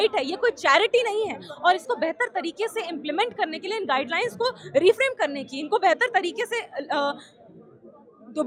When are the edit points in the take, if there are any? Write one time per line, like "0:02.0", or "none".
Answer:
none